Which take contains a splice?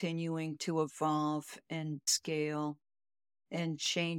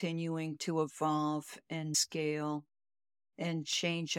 second; 1 cut; at 2.0 s

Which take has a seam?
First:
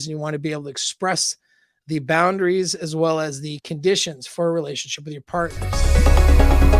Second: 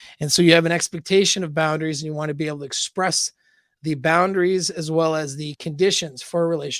first; 1 cut; at 5.8 s

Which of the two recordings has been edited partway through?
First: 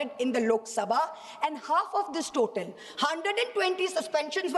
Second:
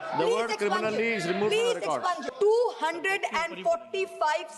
second; 1 cut; at 2.3 s

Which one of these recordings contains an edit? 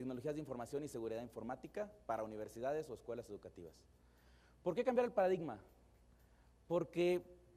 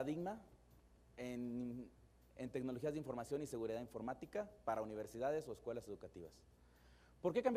first; 1 cut; at 6.6 s

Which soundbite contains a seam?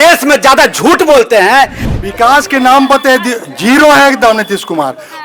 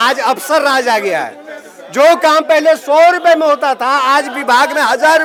first; 1 cut; at 1.8 s

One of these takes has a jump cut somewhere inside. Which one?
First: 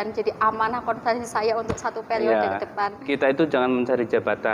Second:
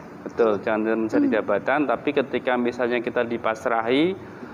first; 1 cut; at 3.0 s

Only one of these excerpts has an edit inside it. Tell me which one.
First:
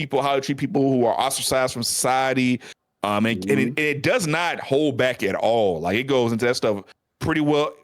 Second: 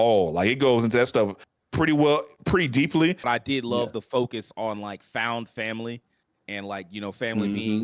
second; 1 cut; at 3.3 s

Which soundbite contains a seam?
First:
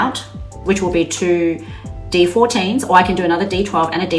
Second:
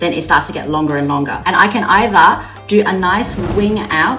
second; 1 cut; at 1.4 s

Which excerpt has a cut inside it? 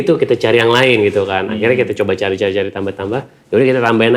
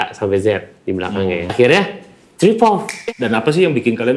second; 2 cuts; at 1.5 s, 2.9 s

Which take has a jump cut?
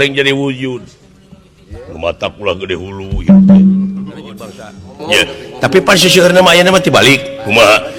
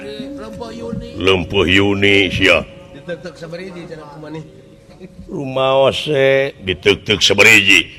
first; 1 cut; at 4.9 s

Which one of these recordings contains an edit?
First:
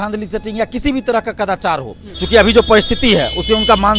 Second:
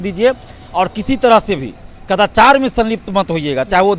first; 1 cut; at 2.1 s

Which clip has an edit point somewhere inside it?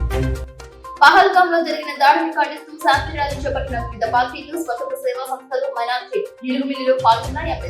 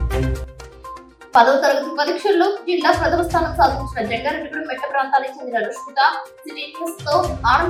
first; 1 cut; at 0.9 s

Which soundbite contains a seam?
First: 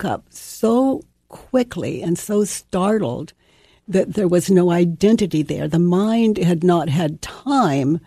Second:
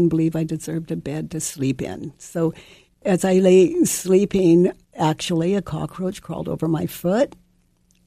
second; 1 cut; at 3.0 s

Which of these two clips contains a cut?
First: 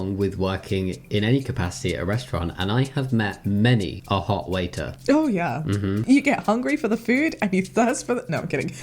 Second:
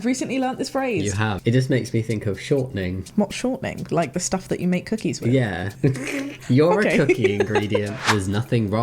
second; 3 cuts; at 1.4 s, 5.9 s, 8.0 s

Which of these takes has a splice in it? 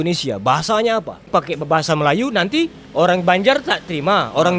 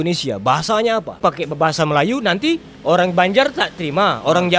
second; 1 cut; at 1.1 s

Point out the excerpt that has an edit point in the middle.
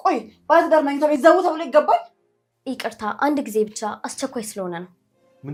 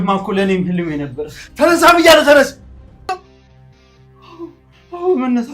second; 1 cut; at 3.1 s

